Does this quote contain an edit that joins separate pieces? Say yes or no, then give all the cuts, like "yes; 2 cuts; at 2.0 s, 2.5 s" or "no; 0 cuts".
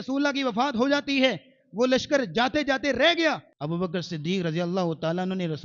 yes; 1 cut; at 3.5 s